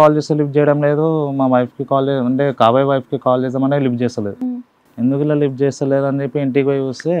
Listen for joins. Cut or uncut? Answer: uncut